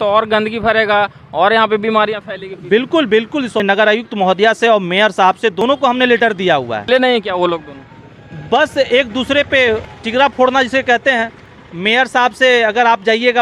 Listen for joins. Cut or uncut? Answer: cut